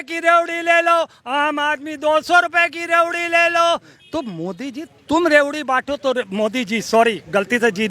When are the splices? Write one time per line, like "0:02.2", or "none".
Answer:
none